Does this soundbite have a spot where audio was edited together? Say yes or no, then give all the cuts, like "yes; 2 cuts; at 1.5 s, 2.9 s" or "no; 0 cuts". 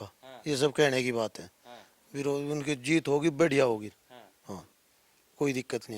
no; 0 cuts